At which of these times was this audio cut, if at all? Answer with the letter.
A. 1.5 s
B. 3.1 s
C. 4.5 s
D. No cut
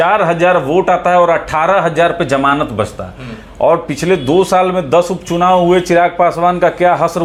D